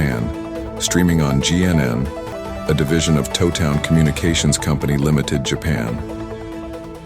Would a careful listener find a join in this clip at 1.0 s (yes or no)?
no